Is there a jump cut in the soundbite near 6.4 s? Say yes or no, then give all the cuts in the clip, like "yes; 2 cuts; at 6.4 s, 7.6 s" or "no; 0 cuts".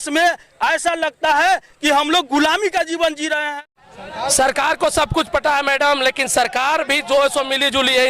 no; 1 cut; at 3.5 s